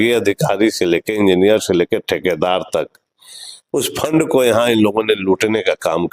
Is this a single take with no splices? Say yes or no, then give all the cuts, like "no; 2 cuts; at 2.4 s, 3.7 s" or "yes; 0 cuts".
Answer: yes; 0 cuts